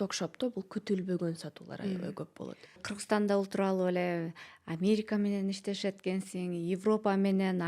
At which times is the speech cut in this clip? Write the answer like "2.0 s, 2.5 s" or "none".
2.9 s